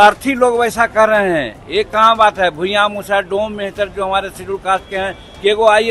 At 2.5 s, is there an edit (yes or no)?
no